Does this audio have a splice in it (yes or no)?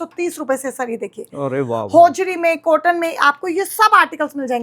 no